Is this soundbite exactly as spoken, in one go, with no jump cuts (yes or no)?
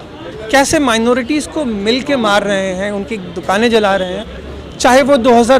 no